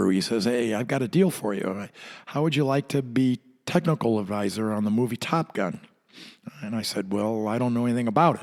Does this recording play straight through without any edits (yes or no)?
yes